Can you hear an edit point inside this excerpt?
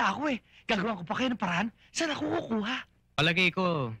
yes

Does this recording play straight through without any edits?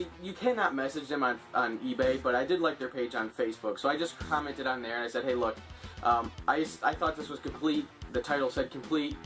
yes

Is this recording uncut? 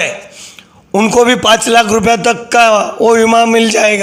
yes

